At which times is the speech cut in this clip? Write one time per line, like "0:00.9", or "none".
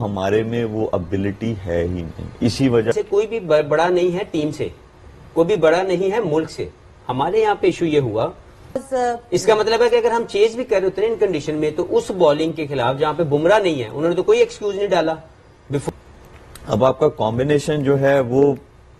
0:02.9
0:08.8
0:15.8